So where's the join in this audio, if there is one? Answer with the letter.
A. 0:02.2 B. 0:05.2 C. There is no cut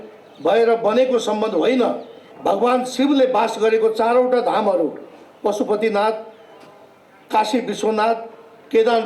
A